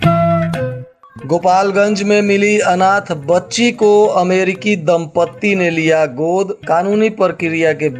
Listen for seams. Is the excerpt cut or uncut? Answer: cut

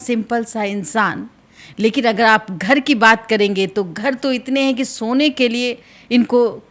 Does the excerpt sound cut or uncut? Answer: uncut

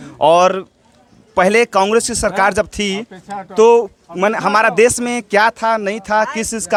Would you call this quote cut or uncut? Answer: uncut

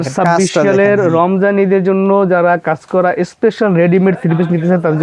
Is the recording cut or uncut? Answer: uncut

